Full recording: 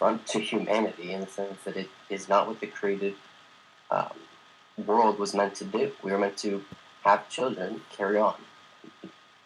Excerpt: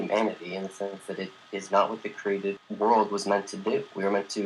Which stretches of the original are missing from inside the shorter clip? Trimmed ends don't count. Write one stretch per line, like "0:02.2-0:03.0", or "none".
0:03.2-0:04.7